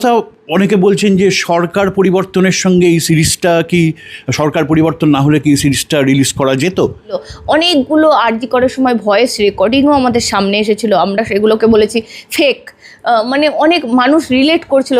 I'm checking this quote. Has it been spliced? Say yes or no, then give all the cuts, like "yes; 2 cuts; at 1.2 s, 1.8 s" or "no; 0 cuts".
yes; 1 cut; at 7.3 s